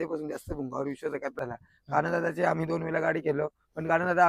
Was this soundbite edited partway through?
yes; 1 cut; at 1.4 s

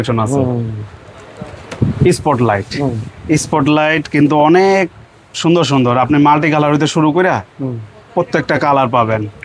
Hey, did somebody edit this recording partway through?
no; 0 cuts

